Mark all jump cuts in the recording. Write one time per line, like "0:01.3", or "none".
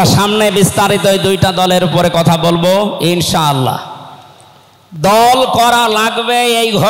none

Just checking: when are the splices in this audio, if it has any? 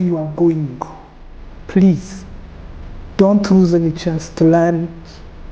0:01.5
0:04.3

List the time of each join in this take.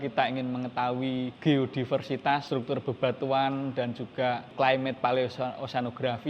0:01.3
0:02.5
0:04.5

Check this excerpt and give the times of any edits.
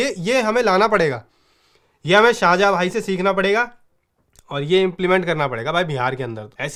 none

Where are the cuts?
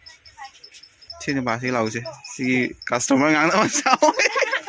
0:01.0

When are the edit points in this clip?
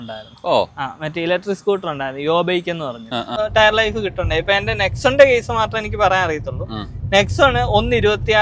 0:03.4

